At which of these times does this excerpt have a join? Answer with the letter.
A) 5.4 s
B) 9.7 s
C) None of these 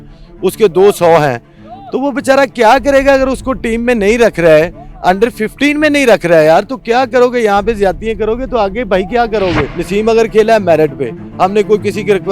B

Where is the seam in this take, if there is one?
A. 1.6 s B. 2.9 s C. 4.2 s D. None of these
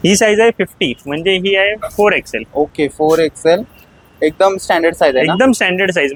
D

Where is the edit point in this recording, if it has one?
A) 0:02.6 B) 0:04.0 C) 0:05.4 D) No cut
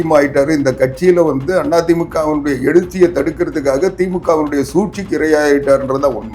D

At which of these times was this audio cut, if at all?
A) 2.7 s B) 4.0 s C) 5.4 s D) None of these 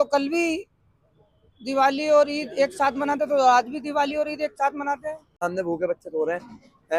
C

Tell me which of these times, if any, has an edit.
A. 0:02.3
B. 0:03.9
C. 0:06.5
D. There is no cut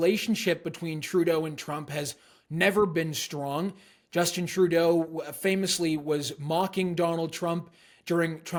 D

